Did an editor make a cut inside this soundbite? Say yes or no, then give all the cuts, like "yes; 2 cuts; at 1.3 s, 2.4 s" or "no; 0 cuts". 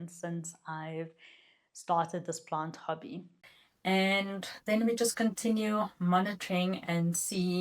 yes; 1 cut; at 3.4 s